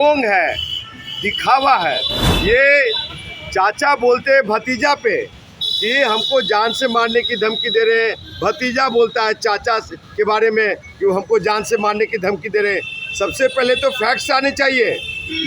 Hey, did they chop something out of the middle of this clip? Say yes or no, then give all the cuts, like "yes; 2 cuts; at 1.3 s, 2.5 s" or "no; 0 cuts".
no; 0 cuts